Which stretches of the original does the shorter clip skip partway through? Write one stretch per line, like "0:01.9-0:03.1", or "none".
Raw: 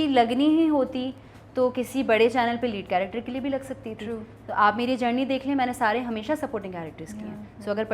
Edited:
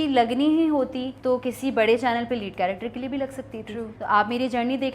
0:01.1-0:01.4
0:04.3-0:04.4